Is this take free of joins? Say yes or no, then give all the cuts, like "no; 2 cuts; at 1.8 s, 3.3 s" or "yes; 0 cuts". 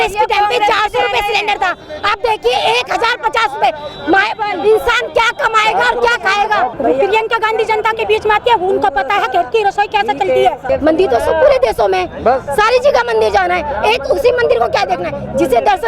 no; 2 cuts; at 6.7 s, 10.6 s